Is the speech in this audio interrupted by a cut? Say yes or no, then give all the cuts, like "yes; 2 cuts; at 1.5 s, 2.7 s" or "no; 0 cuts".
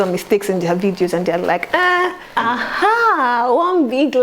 yes; 1 cut; at 2.2 s